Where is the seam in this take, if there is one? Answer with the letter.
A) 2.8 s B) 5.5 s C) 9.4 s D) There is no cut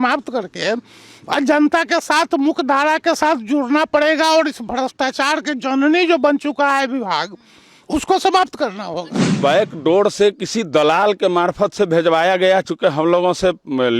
C